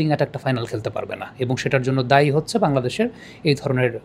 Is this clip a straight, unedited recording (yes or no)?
yes